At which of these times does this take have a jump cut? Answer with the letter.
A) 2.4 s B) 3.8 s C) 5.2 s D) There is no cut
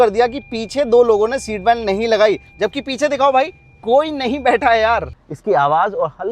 C